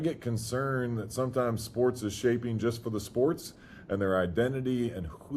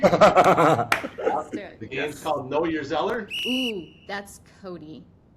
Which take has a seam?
second; 1 cut; at 3.1 s

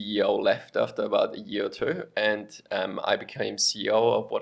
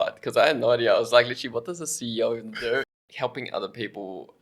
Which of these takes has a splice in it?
second; 1 cut; at 2.9 s

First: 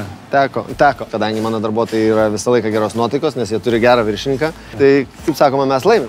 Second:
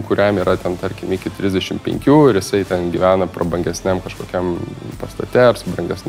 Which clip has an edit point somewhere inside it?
first; 2 cuts; at 1.1 s, 4.7 s

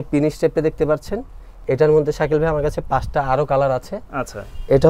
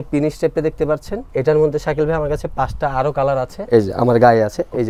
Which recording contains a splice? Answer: second; 2 cuts; at 1.2 s, 3.6 s

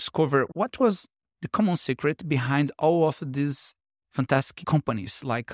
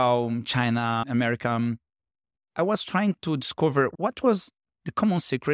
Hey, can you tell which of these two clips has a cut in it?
second; 1 cut; at 1.0 s

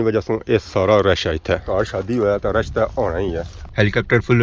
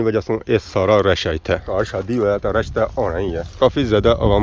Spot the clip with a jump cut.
first; 1 cut; at 3.4 s

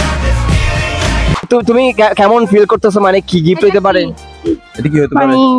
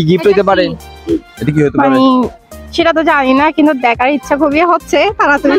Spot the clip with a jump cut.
first; 1 cut; at 1.5 s

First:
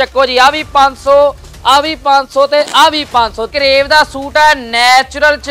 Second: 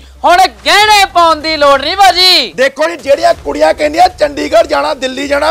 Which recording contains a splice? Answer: first; 1 cut; at 3.4 s

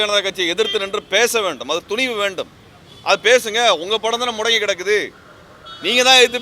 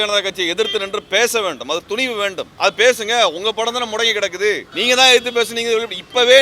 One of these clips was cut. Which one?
second; 2 cuts; at 2.5 s, 4.7 s

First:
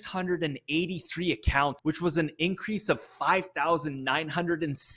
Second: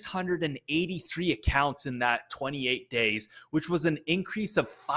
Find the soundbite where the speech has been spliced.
first; 1 cut; at 1.8 s

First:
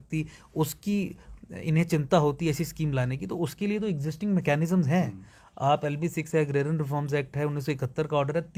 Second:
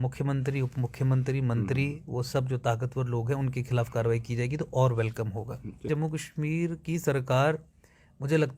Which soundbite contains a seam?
second; 1 cut; at 5.9 s

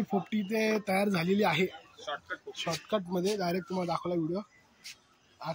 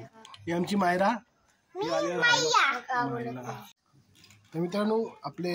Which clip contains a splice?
second; 1 cut; at 3.7 s

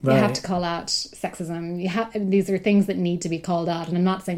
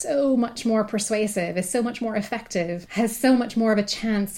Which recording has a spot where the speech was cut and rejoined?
second; 1 cut; at 2.8 s

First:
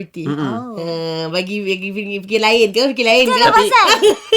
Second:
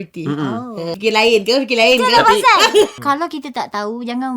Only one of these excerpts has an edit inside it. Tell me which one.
second; 2 cuts; at 1.0 s, 2.9 s

